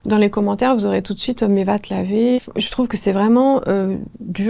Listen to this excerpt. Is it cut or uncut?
cut